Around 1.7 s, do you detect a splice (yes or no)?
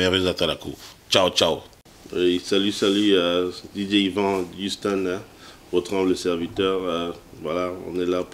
yes